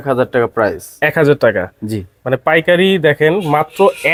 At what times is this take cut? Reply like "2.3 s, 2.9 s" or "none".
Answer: none